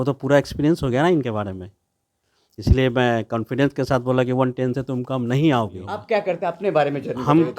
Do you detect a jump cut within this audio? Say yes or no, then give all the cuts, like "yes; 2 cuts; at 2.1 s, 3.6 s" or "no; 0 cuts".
yes; 1 cut; at 5.9 s